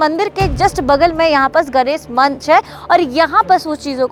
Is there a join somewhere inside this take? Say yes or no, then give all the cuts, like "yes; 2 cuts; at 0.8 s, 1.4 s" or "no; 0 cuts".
no; 0 cuts